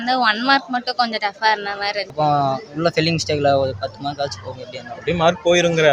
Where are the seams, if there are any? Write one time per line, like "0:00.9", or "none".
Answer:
0:02.1